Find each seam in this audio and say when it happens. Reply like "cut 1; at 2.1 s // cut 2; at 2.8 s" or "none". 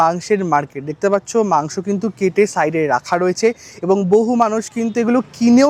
none